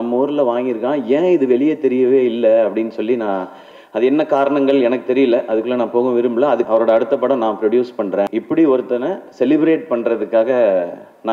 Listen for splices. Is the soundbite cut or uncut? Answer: cut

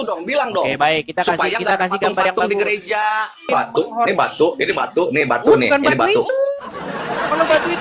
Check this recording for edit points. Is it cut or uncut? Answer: cut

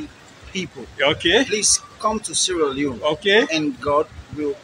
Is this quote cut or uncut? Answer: uncut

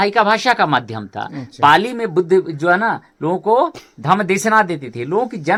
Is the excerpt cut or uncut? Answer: uncut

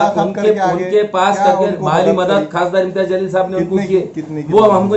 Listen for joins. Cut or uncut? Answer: uncut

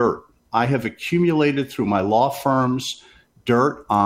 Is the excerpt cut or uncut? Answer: uncut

